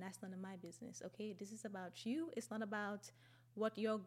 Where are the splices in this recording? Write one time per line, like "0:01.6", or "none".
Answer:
none